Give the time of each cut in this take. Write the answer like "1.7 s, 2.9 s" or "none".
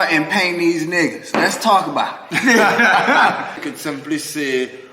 3.7 s